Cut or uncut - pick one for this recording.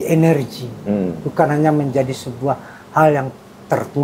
uncut